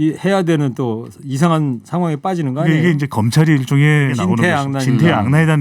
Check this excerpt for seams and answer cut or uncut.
cut